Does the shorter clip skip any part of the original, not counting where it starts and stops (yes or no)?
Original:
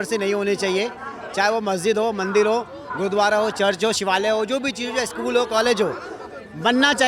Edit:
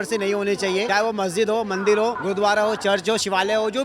yes